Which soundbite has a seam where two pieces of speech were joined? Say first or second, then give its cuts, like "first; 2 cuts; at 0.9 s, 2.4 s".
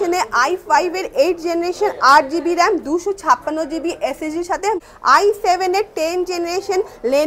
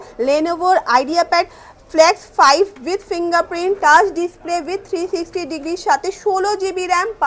first; 1 cut; at 4.8 s